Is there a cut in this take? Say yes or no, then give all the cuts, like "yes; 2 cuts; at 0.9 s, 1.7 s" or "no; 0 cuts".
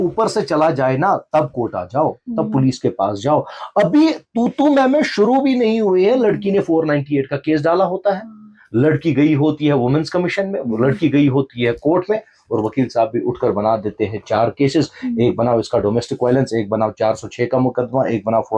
no; 0 cuts